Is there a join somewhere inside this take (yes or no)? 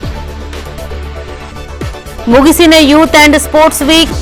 no